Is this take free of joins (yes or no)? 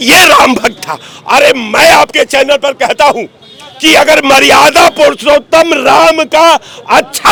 yes